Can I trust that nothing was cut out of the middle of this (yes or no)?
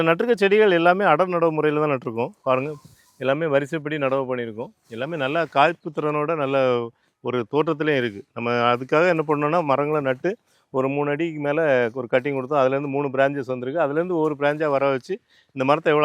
yes